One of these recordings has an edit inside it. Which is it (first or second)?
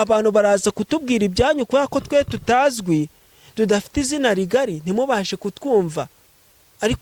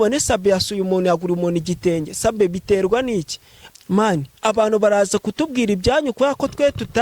second